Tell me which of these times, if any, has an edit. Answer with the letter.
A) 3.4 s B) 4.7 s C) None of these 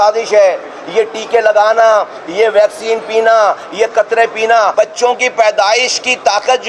B